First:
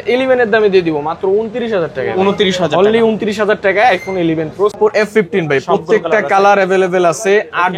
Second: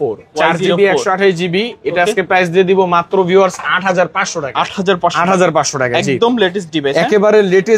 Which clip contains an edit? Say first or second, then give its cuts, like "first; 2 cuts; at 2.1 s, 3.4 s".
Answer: first; 1 cut; at 4.7 s